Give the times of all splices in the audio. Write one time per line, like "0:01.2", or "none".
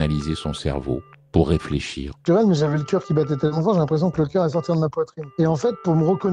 0:02.2
0:05.2